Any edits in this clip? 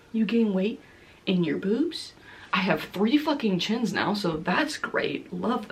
no; 0 cuts

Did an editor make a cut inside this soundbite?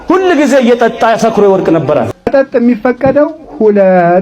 yes; 1 cut; at 2.2 s

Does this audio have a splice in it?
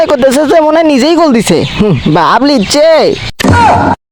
no; 0 cuts

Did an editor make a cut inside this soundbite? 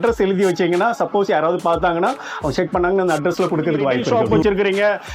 yes; 1 cut; at 4.0 s

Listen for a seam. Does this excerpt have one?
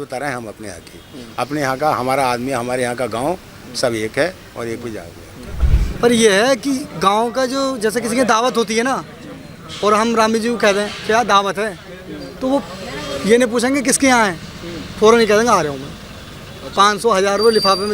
yes; 1 cut; at 5.6 s

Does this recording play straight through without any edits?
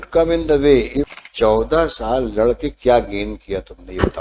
no; 1 cut; at 1.1 s

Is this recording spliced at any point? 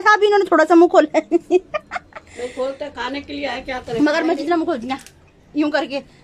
yes; 1 cut; at 1.3 s

